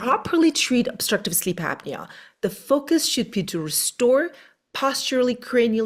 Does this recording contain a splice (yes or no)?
no